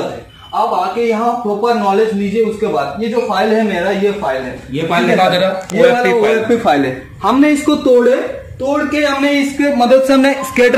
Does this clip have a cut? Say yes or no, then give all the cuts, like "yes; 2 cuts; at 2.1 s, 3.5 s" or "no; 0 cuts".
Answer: no; 0 cuts